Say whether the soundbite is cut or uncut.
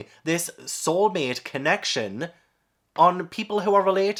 uncut